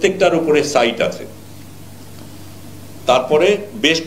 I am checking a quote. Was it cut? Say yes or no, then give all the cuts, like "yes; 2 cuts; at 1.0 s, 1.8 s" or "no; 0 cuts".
no; 0 cuts